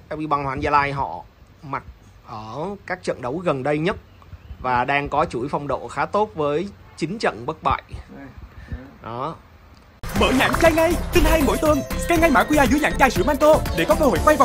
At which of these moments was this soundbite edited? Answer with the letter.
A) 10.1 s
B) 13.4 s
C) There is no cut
A